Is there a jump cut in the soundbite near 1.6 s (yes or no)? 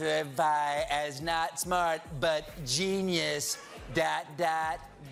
no